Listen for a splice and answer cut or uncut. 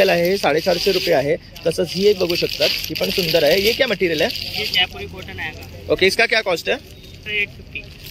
uncut